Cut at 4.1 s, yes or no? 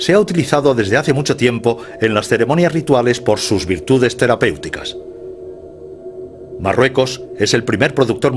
yes